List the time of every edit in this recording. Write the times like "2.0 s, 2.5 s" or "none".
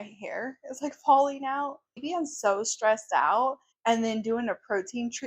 2.0 s